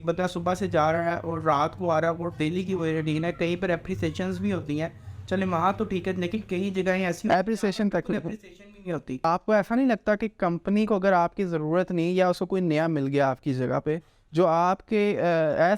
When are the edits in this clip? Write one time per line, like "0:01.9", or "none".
0:09.2